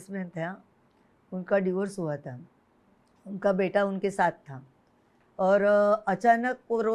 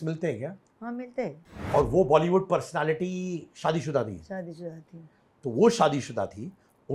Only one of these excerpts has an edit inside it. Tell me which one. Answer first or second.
second